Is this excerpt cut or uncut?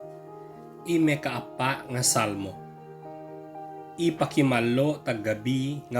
cut